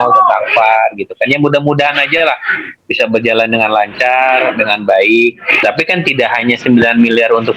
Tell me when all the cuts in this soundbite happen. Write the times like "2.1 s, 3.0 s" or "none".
5.6 s